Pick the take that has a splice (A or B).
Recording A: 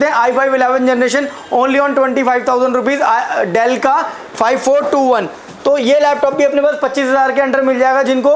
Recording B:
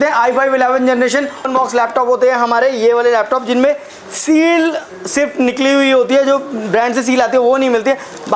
B